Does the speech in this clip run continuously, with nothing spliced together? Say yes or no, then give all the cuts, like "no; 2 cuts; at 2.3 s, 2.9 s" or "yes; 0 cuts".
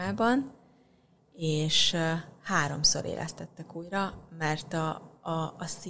yes; 0 cuts